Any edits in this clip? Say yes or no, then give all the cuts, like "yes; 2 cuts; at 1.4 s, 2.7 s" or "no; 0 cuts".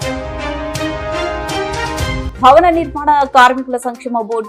no; 0 cuts